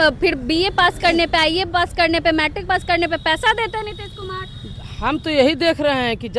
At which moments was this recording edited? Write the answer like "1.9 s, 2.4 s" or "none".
none